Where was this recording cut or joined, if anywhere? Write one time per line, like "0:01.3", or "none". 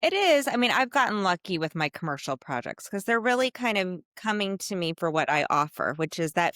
none